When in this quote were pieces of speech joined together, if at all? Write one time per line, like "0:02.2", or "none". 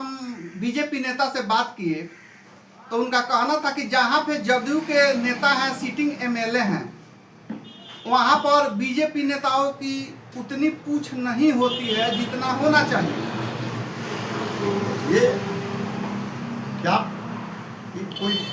none